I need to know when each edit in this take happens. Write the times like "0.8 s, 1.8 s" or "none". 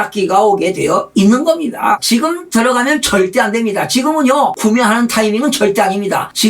2.0 s, 4.6 s